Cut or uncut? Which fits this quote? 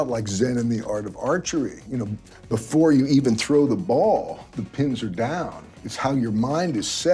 uncut